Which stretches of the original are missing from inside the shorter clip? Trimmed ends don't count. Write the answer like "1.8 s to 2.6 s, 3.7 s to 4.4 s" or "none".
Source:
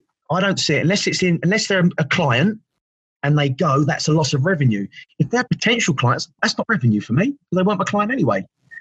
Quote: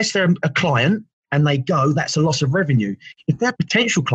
2.7 s to 3.1 s